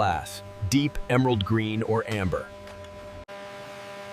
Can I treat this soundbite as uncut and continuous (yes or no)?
no